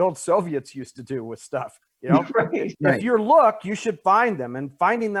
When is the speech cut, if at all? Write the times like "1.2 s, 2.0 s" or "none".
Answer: none